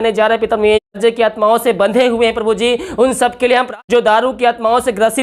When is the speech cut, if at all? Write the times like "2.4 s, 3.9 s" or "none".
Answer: 0.9 s, 3.7 s